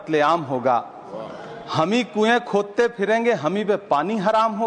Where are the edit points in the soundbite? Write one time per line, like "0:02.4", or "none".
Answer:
none

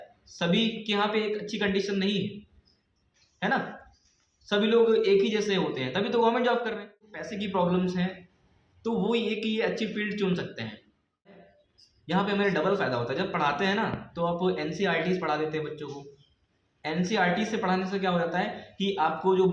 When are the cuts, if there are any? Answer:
0:07.2
0:11.3

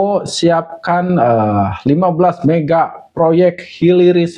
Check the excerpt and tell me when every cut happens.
none

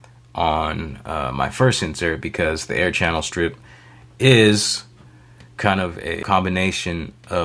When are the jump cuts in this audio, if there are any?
0:06.2

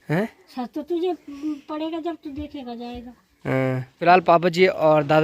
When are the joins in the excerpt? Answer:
none

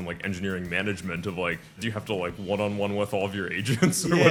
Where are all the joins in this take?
none

